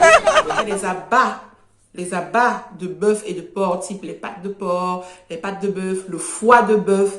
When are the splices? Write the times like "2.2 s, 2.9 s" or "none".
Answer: 1.0 s